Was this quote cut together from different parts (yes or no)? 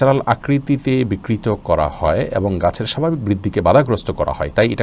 no